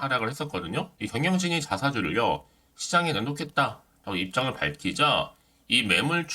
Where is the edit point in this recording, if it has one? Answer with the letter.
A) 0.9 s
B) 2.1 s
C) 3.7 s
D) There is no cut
A